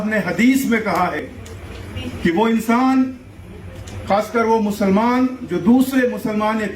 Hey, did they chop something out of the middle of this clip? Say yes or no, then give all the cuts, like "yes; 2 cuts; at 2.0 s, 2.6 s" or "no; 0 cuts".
yes; 1 cut; at 1.2 s